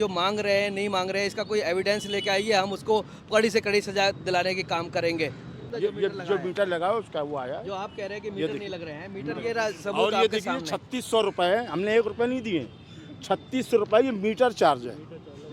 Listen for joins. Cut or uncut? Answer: cut